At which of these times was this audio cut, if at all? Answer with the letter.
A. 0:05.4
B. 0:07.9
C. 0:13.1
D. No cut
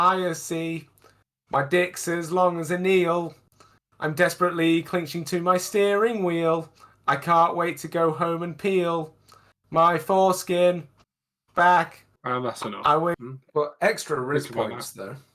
C